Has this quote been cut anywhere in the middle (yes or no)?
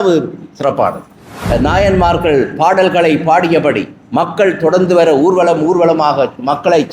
yes